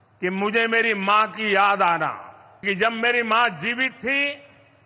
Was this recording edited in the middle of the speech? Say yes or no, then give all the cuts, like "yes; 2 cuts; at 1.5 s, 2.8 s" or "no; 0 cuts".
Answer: yes; 1 cut; at 2.6 s